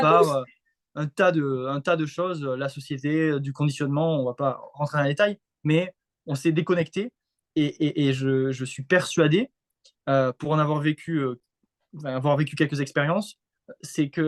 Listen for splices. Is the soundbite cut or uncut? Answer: uncut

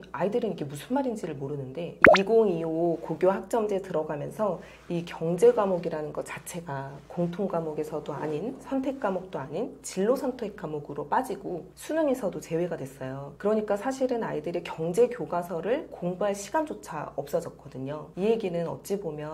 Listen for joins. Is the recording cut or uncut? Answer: cut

